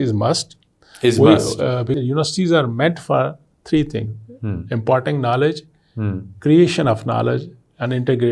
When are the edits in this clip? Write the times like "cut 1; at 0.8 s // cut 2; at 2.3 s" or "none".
cut 1; at 1.9 s